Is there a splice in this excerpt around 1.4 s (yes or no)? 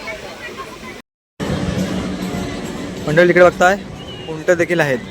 yes